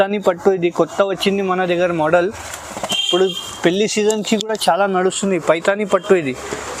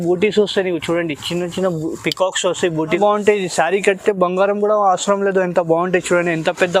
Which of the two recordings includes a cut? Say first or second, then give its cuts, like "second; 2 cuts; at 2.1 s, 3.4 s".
second; 1 cut; at 3.0 s